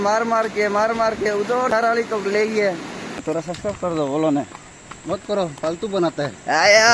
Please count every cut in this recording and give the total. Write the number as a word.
two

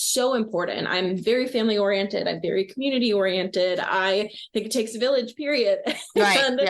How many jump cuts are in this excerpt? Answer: zero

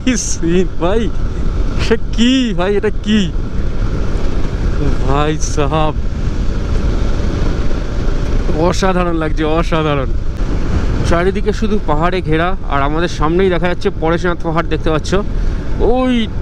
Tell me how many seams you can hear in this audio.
zero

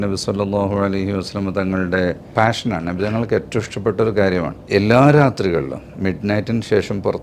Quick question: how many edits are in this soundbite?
two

